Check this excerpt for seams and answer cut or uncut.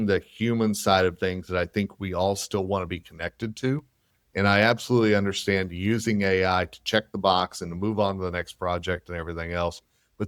uncut